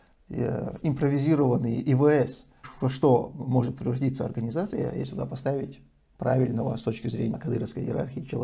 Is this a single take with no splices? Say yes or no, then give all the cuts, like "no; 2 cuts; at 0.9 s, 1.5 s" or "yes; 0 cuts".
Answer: no; 2 cuts; at 2.7 s, 7.4 s